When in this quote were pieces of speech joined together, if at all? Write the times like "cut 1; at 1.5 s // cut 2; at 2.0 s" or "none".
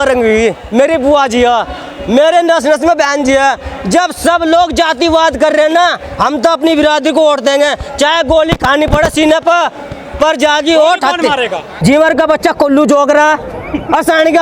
cut 1; at 11.7 s